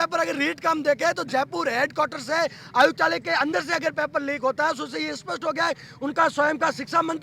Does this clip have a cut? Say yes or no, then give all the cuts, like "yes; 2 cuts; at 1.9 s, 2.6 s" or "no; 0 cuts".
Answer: no; 0 cuts